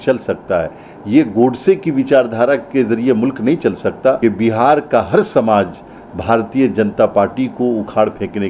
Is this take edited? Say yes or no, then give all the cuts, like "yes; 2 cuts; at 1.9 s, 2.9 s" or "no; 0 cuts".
yes; 1 cut; at 4.2 s